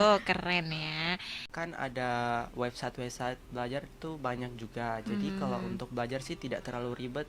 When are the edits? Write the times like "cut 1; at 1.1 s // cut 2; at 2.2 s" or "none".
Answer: cut 1; at 1.4 s